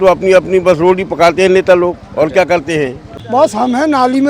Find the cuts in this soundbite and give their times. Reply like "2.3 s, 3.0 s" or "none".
3.2 s